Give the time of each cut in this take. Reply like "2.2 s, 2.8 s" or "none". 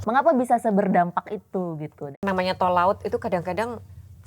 2.2 s